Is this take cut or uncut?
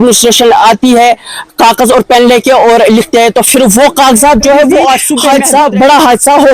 cut